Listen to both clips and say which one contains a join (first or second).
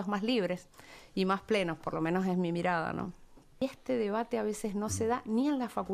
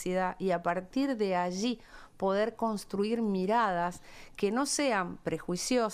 first